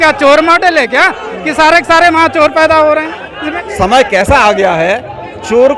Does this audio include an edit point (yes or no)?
yes